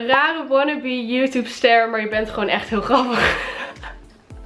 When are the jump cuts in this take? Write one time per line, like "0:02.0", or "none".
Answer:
none